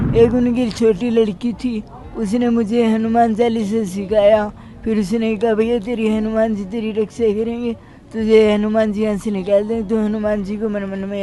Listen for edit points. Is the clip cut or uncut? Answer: uncut